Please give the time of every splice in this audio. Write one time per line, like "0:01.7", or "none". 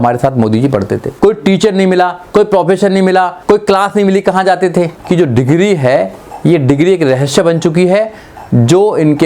0:01.0
0:03.4
0:05.0